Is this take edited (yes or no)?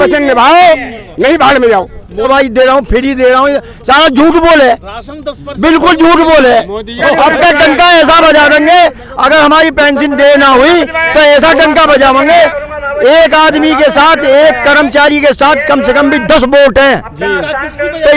yes